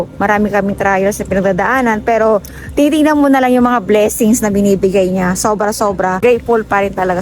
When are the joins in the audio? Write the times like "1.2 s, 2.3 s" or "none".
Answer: 6.2 s